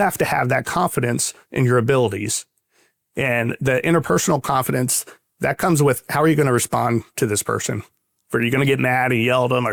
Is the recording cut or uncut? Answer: uncut